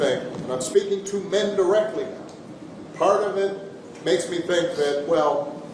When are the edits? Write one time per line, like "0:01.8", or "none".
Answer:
none